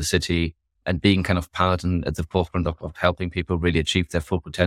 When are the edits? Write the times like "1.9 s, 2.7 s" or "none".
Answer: 2.0 s